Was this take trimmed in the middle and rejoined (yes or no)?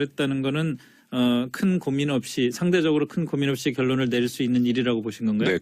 yes